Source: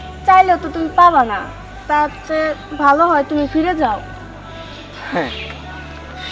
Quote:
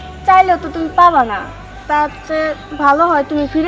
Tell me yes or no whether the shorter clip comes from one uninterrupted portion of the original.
yes